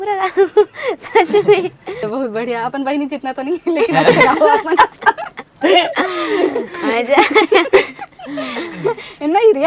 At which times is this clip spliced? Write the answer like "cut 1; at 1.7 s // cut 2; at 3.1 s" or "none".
cut 1; at 2.0 s